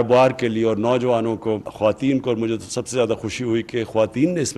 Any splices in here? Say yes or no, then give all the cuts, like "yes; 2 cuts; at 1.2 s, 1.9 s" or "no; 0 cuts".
yes; 1 cut; at 1.7 s